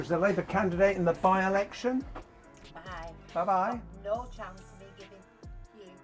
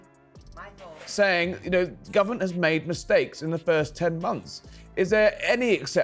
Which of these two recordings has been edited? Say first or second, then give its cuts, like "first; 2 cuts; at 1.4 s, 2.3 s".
second; 1 cut; at 1.1 s